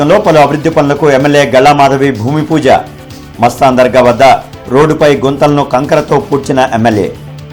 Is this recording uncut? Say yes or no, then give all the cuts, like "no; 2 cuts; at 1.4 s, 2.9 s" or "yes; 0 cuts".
yes; 0 cuts